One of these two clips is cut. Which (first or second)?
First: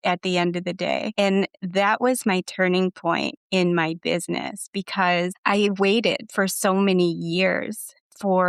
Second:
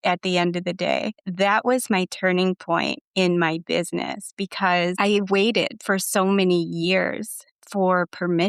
second